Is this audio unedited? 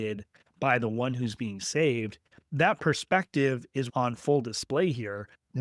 no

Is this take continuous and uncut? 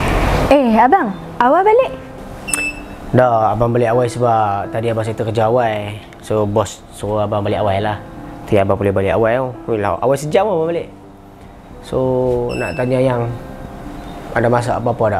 yes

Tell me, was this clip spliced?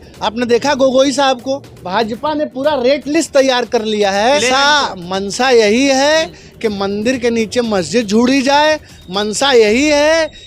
yes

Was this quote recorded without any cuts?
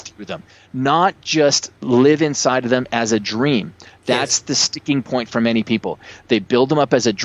yes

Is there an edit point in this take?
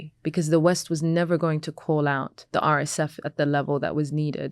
yes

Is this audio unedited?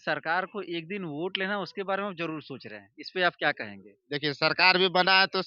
yes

